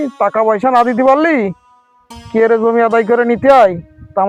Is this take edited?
no; 0 cuts

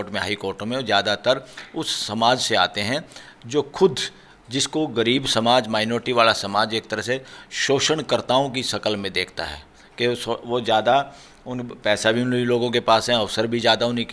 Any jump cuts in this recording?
no; 0 cuts

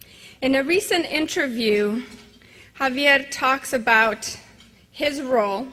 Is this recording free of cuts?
no; 1 cut; at 1.2 s

